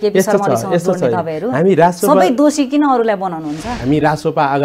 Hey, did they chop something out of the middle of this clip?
yes; 1 cut; at 3.7 s

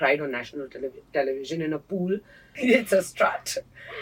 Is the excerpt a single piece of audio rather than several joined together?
no; 1 cut; at 2.5 s

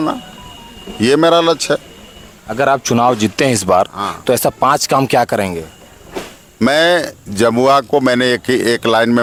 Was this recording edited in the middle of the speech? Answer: no; 0 cuts

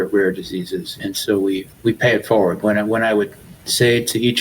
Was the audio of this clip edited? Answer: yes; 2 cuts; at 0.9 s, 1.7 s

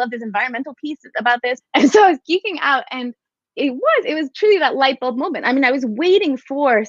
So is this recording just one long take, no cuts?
no; 1 cut; at 1.6 s

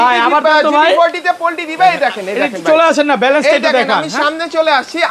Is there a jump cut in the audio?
no; 0 cuts

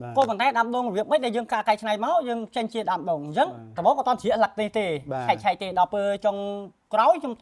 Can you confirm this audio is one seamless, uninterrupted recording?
no; 1 cut; at 3.7 s

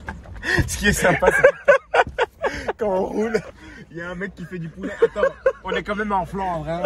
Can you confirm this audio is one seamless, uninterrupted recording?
yes; 0 cuts

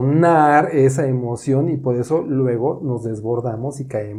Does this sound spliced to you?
no; 0 cuts

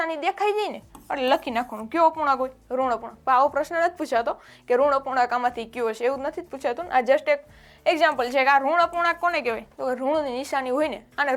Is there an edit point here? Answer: no; 0 cuts

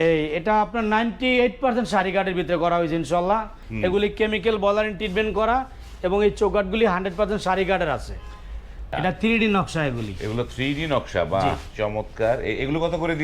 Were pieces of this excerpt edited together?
yes; 2 cuts; at 3.6 s, 8.8 s

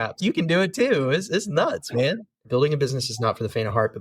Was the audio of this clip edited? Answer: yes; 1 cut; at 2.4 s

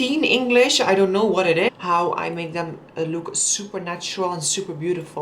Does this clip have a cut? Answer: yes; 1 cut; at 1.7 s

